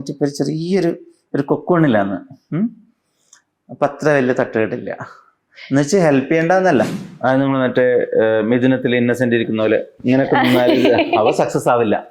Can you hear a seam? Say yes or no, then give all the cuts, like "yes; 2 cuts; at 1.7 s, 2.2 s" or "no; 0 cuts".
yes; 1 cut; at 7.0 s